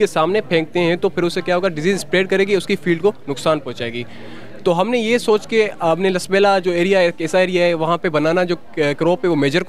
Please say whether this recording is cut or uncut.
uncut